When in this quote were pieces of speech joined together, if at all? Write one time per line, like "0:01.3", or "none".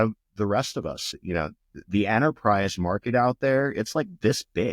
0:01.2